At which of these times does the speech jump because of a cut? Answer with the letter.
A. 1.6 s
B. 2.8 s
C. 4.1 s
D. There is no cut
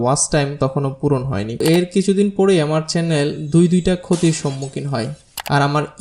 A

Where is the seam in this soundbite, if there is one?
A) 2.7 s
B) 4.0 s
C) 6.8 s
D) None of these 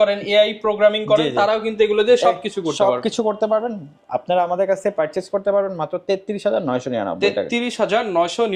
D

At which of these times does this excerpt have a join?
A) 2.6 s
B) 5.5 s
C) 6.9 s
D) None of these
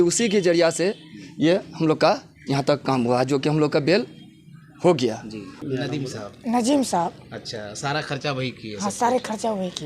B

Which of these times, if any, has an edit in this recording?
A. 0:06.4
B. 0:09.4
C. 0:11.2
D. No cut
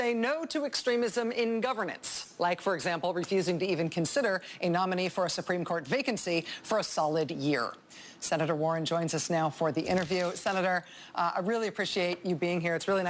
B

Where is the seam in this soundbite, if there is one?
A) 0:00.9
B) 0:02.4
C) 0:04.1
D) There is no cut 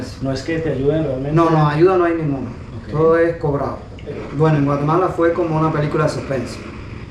C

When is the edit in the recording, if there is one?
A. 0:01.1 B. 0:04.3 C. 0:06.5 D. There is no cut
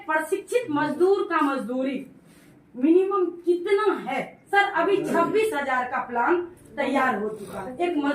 B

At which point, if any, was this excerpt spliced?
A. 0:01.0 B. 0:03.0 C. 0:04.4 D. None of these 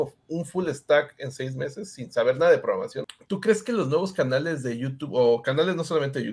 B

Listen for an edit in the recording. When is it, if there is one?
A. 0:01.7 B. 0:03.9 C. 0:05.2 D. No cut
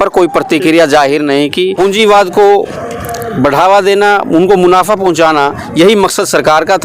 A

